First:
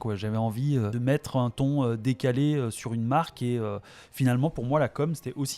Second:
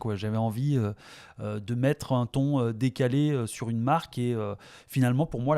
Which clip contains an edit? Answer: first; 1 cut; at 0.9 s

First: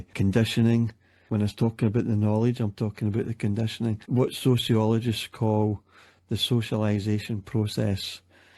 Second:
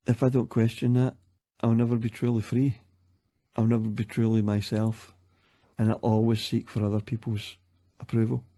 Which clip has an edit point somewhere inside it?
first; 1 cut; at 1.2 s

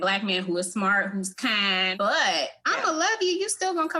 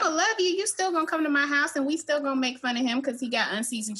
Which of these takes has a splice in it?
first; 1 cut; at 1.9 s

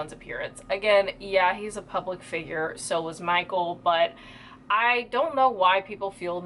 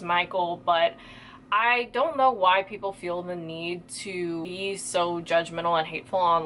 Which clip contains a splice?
second; 1 cut; at 4.5 s

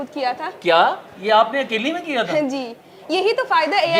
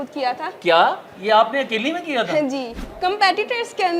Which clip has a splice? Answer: second; 1 cut; at 2.8 s

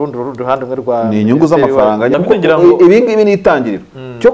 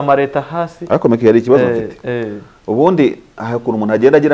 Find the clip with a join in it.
first; 1 cut; at 2.1 s

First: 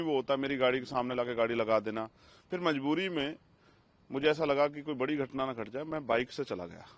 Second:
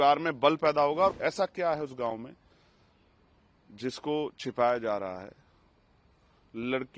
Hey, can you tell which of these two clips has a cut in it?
second; 1 cut; at 1.1 s

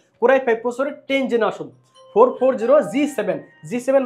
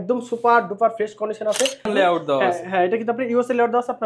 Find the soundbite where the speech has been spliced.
second; 1 cut; at 1.9 s

